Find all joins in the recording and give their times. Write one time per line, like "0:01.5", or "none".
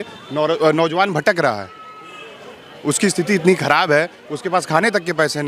none